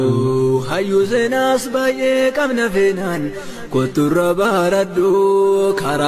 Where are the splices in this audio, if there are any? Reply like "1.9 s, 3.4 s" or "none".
none